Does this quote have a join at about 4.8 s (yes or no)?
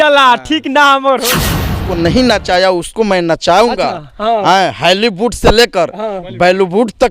no